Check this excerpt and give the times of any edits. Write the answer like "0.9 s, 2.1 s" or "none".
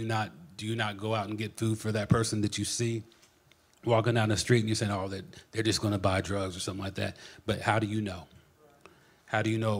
none